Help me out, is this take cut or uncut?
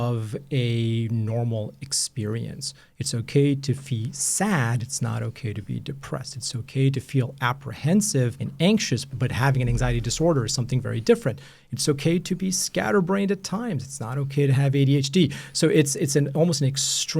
cut